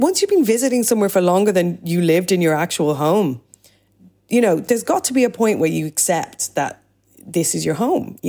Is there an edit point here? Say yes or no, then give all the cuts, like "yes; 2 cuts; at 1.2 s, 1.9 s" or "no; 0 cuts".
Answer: yes; 1 cut; at 4.6 s